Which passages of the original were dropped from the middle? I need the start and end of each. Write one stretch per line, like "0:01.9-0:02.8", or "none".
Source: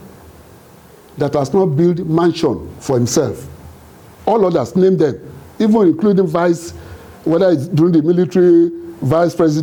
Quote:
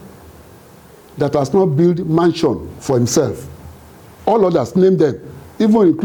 none